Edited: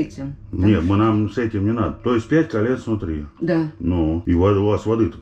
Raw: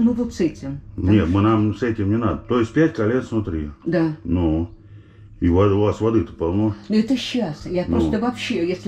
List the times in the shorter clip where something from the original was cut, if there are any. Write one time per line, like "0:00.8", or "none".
0:04.2